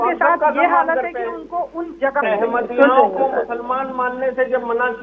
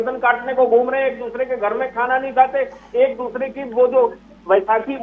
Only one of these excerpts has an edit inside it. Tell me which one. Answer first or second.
first